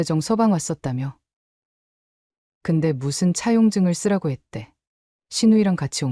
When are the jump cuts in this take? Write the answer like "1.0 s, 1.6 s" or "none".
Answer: none